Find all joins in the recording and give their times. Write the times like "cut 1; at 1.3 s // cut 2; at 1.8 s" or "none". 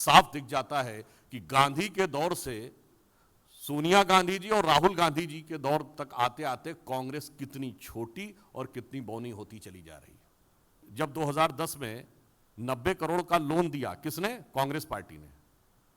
cut 1; at 10.8 s